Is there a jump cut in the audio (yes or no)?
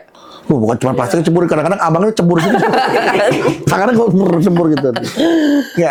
no